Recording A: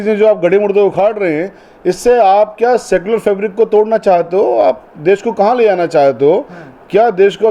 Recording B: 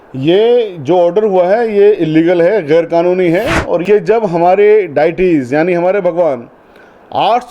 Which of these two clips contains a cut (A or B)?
B